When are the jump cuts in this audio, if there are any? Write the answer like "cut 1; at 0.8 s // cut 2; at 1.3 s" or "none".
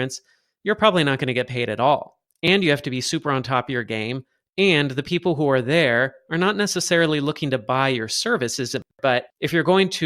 cut 1; at 8.9 s